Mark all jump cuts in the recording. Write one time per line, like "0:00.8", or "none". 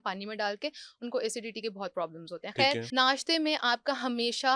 0:02.8